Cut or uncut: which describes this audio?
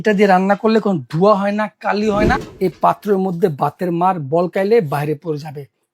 cut